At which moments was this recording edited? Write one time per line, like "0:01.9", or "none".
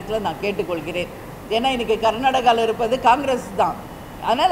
none